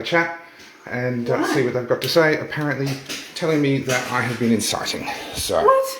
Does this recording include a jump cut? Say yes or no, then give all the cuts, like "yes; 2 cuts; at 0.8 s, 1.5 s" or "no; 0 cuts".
no; 0 cuts